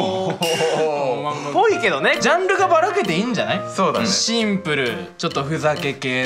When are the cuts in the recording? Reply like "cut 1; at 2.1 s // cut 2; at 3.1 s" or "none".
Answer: cut 1; at 2.2 s // cut 2; at 4.1 s